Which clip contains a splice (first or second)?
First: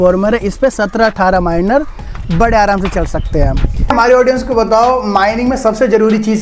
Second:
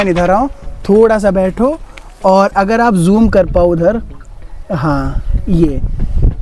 first